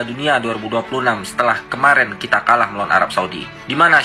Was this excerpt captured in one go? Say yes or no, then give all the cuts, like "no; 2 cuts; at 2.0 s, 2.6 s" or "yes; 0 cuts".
yes; 0 cuts